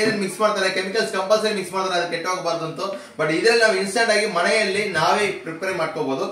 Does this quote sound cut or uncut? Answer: uncut